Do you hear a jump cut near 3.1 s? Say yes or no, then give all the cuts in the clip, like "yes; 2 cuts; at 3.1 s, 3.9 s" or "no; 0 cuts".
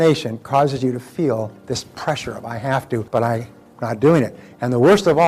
yes; 1 cut; at 3.1 s